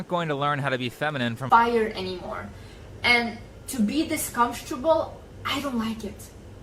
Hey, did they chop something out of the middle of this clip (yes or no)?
yes